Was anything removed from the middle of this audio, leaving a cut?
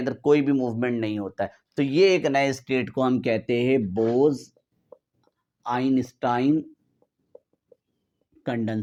no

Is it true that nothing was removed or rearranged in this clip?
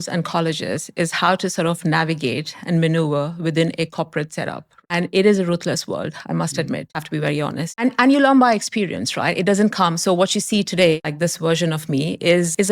no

